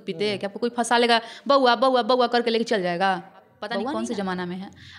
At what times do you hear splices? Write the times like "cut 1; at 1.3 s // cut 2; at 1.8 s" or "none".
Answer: cut 1; at 3.8 s